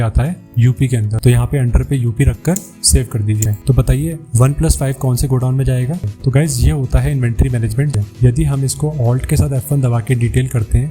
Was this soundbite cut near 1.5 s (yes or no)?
no